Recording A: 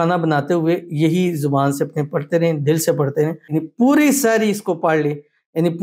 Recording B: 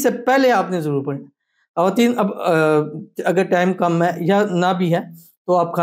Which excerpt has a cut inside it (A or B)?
A